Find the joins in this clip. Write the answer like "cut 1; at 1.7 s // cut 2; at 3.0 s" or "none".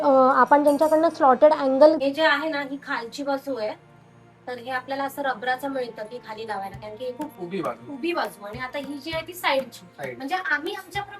cut 1; at 2.0 s // cut 2; at 7.3 s